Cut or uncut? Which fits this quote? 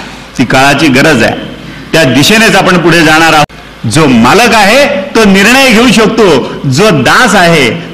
cut